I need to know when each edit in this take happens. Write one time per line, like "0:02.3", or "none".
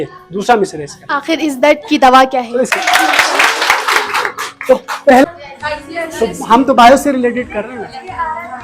0:02.7
0:05.2

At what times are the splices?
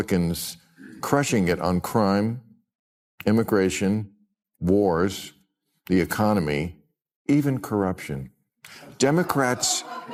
none

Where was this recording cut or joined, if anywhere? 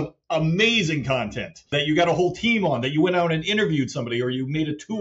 0:01.7

